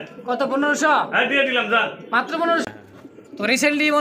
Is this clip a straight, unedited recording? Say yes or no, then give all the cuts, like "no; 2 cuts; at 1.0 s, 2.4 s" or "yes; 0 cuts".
no; 1 cut; at 2.6 s